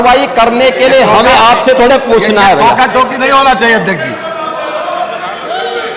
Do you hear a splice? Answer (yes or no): no